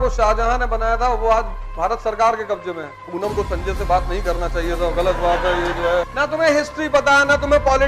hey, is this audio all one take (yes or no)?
no